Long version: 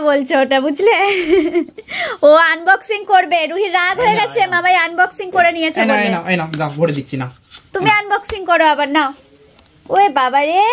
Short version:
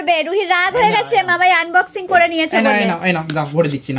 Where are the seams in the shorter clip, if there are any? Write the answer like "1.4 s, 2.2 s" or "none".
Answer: none